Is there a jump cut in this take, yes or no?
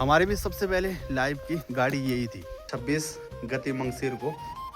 yes